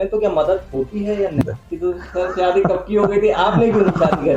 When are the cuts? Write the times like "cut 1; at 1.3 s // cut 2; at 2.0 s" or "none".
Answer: cut 1; at 1.4 s